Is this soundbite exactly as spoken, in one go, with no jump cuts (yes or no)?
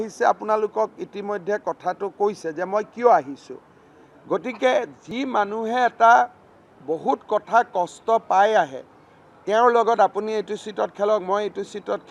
yes